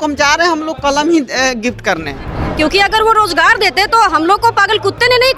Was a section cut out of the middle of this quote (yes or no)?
yes